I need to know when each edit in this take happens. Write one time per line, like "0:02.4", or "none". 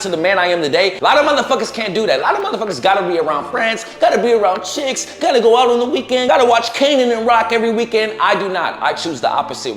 0:01.0